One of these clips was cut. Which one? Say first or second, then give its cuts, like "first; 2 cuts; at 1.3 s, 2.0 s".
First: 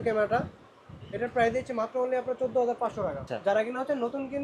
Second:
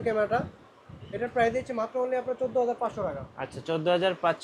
first; 1 cut; at 3.3 s